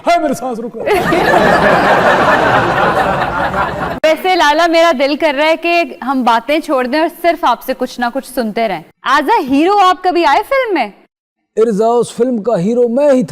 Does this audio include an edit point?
yes; 2 cuts; at 3.9 s, 8.8 s

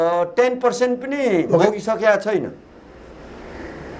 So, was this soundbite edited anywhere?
no; 0 cuts

